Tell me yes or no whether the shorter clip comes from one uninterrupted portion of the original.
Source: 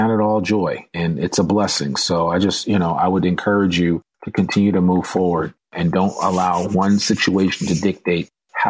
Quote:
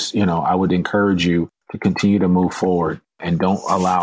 yes